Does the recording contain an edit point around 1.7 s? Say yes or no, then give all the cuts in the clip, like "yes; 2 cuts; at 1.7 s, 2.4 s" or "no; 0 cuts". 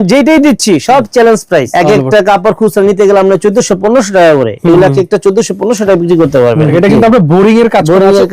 yes; 2 cuts; at 1.7 s, 6.7 s